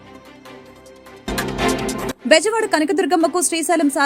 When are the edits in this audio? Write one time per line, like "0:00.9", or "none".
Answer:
0:01.1
0:02.2